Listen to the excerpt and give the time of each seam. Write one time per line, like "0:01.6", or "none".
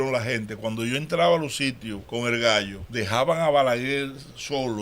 0:01.9
0:02.8